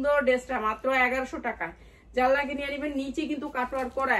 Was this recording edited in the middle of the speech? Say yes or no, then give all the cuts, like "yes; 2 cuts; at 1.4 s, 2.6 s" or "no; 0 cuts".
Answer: no; 0 cuts